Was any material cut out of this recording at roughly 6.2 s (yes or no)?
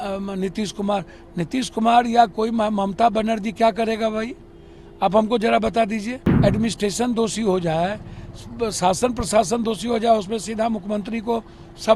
yes